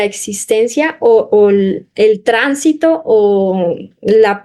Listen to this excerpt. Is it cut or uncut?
uncut